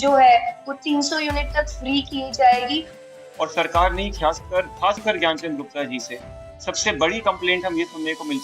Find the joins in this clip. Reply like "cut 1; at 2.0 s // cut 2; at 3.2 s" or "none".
cut 1; at 3.0 s